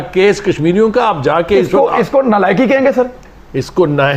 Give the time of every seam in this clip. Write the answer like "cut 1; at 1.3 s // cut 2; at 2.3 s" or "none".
none